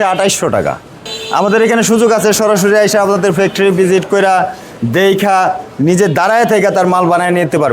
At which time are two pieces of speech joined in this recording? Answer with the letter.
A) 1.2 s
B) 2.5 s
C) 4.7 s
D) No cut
A